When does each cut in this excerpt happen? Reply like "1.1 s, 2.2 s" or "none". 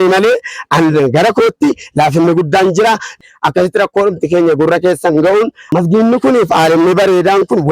3.2 s